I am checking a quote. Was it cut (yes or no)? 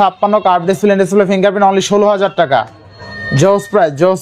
no